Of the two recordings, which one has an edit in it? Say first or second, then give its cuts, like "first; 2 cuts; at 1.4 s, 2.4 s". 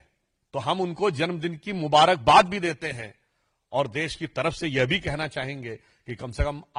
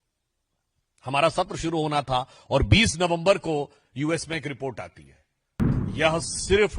second; 1 cut; at 5.7 s